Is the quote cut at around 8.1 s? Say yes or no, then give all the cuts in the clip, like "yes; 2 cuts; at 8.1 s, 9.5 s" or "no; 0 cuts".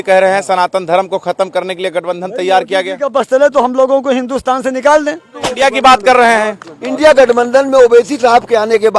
no; 1 cut; at 5.5 s